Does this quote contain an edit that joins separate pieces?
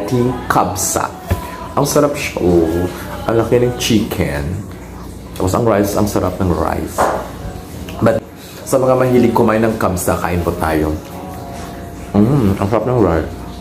yes; 1 cut; at 8.2 s

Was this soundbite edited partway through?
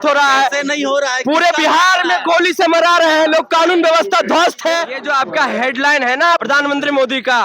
yes; 2 cuts; at 4.9 s, 6.4 s

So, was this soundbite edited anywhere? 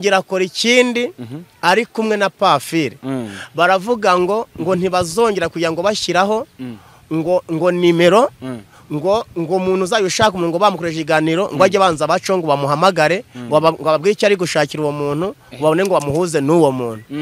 no; 0 cuts

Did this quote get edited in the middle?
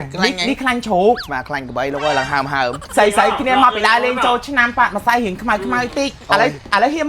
yes; 2 cuts; at 1.2 s, 2.8 s

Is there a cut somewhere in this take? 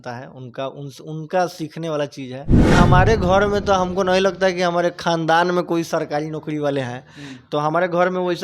yes; 1 cut; at 2.7 s

